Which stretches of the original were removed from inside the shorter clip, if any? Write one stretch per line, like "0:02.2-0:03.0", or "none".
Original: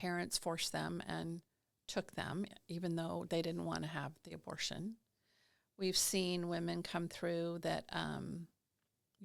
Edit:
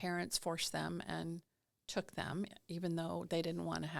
none